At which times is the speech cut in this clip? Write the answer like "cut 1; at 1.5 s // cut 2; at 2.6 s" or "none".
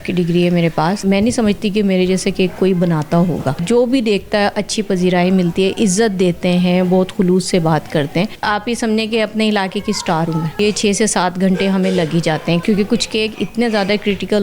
cut 1; at 1.0 s // cut 2; at 3.6 s // cut 3; at 8.4 s // cut 4; at 10.6 s // cut 5; at 12.6 s